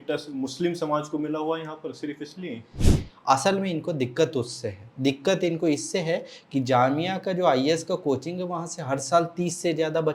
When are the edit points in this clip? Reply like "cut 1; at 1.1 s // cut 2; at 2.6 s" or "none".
cut 1; at 2.8 s